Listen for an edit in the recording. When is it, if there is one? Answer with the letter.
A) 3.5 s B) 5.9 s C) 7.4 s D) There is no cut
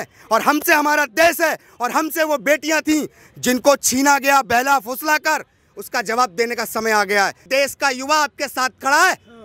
C